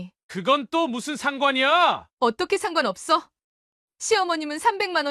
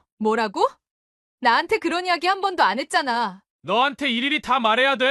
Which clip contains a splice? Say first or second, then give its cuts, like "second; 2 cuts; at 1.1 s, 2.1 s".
second; 1 cut; at 3.4 s